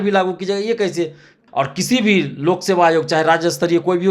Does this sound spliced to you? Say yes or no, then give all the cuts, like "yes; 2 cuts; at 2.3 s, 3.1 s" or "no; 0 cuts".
yes; 1 cut; at 1.4 s